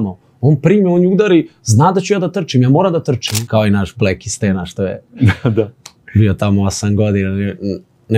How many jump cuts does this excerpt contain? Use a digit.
1